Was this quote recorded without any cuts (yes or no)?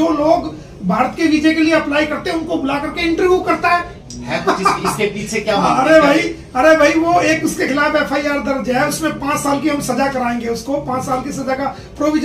no